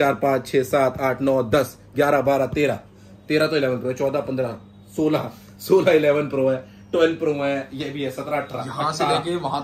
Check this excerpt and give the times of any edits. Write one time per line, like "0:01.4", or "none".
none